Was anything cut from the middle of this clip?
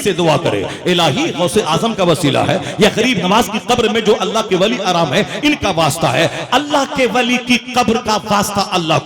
yes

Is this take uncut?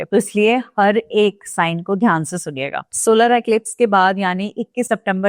no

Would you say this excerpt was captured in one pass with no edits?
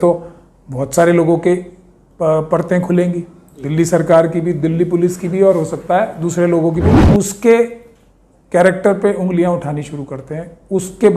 no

